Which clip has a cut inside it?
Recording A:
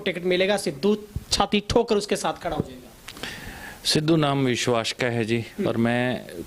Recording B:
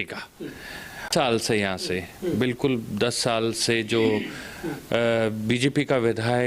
B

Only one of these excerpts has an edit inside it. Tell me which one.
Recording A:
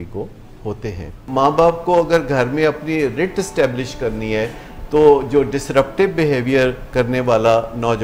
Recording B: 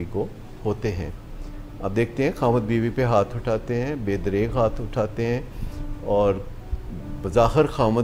A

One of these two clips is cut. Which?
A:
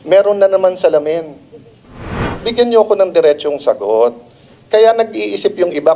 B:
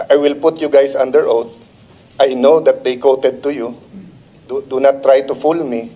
A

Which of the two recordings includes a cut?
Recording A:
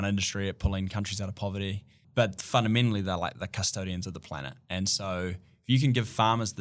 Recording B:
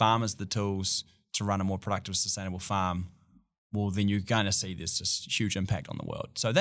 A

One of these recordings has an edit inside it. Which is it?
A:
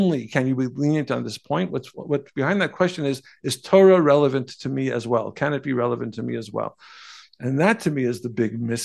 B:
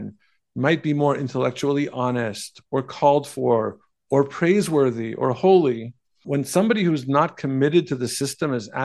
B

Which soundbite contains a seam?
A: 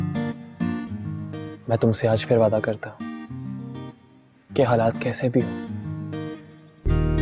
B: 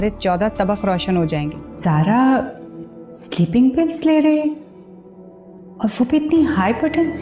B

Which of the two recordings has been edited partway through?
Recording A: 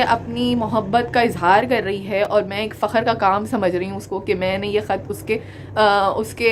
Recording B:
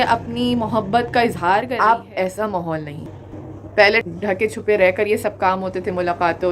B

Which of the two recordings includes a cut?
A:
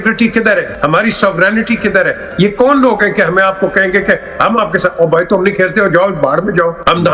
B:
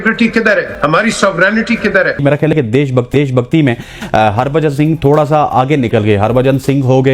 B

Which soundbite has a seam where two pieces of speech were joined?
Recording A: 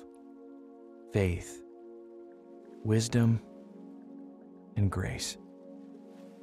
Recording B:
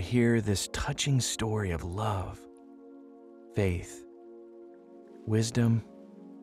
A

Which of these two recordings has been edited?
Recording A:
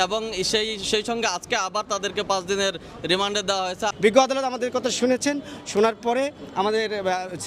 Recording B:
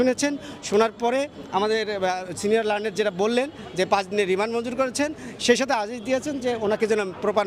A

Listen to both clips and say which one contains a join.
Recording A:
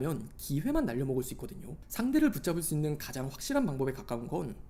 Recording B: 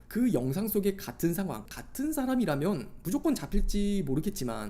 B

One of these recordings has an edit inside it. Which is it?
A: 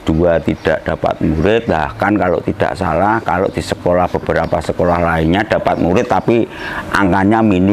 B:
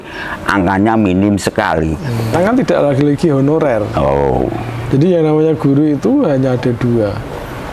B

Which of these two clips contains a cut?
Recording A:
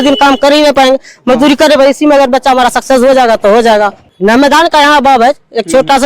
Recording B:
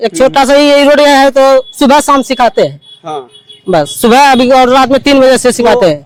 A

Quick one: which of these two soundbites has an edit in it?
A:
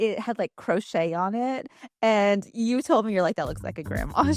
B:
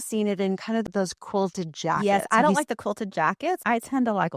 B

